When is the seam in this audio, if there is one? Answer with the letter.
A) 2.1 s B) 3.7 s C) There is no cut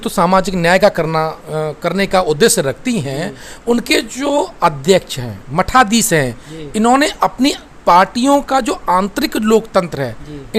C